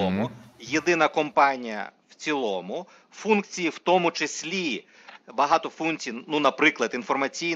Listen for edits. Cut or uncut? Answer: uncut